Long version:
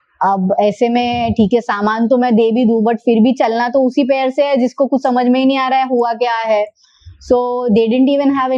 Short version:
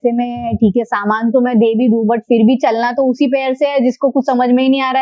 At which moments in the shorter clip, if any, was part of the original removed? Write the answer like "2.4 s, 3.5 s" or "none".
none

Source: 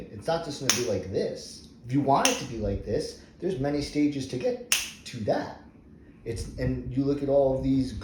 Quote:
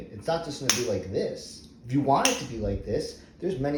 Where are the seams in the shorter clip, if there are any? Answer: none

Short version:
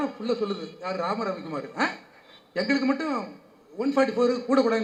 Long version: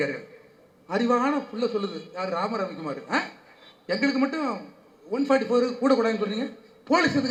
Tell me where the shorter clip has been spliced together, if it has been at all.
none

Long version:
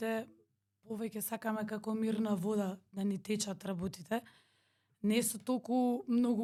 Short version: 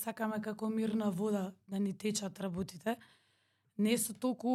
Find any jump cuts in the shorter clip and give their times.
none

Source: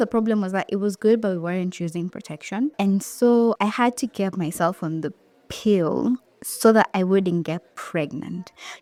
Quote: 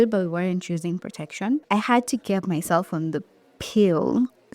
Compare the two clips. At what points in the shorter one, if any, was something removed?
1.7 s

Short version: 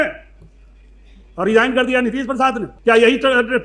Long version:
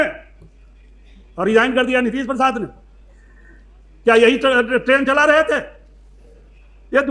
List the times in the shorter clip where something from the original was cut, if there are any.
2.7 s

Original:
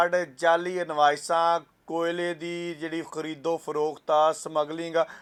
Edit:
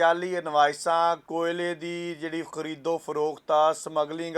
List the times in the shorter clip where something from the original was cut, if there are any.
1.2 s

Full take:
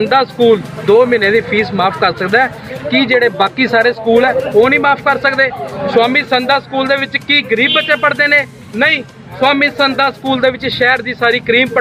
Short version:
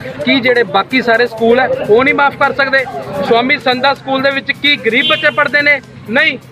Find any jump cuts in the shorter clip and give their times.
none

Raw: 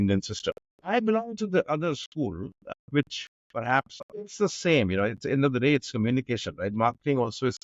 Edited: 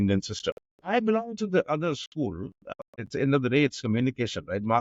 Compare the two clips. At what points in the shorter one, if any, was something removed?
3.0 s

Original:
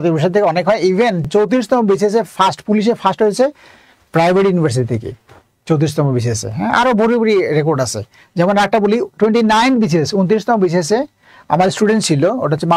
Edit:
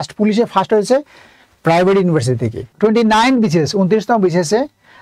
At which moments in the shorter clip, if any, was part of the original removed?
2.7 s

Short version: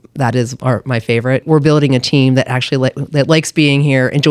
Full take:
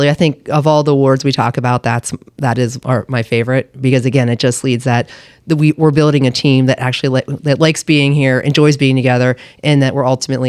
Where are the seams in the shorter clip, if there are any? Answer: 1.4 s

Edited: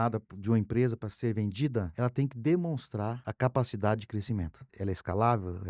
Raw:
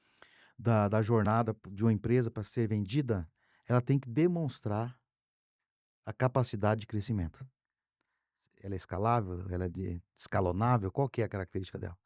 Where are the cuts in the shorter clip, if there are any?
1.9 s, 3.2 s, 4.6 s

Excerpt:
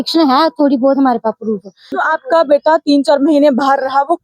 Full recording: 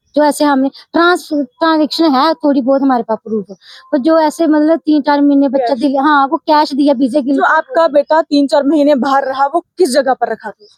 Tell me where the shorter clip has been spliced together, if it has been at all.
2.0 s

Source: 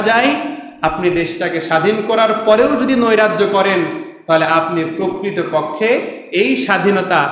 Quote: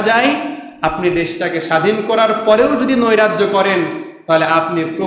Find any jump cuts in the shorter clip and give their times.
none

